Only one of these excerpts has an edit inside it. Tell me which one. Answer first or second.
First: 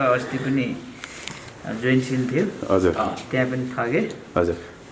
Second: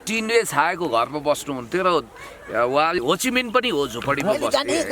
second